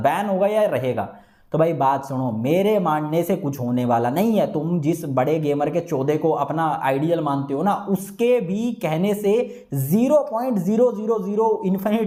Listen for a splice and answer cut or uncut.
uncut